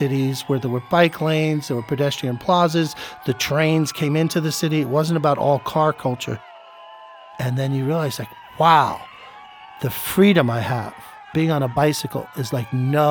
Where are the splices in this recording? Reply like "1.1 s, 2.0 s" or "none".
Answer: 6.8 s